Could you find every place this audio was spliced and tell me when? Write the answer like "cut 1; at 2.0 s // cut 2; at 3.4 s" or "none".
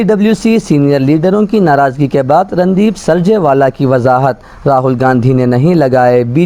none